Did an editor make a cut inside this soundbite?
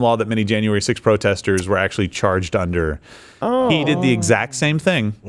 no; 0 cuts

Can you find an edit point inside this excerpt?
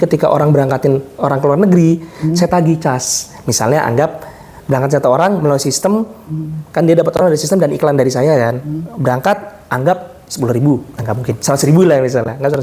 no; 0 cuts

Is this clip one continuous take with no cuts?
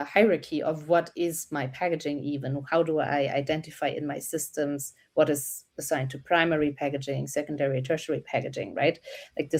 yes; 0 cuts

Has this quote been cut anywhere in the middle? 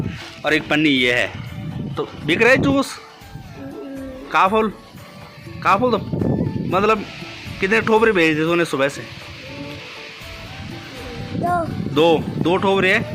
no; 0 cuts

